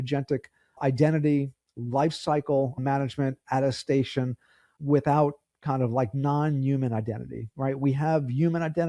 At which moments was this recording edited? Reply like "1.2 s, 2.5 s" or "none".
0.8 s, 2.8 s, 4.7 s